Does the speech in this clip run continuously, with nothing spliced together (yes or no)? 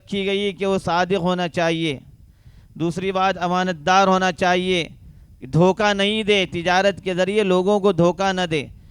yes